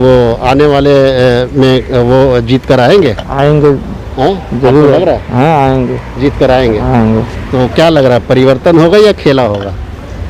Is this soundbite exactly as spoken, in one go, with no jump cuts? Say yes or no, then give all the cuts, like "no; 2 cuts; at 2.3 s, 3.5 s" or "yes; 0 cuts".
yes; 0 cuts